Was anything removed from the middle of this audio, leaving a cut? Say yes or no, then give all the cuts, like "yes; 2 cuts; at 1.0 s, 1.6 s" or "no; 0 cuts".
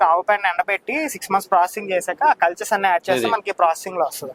no; 0 cuts